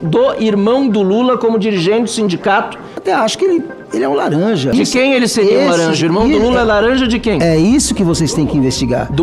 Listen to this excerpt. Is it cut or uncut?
cut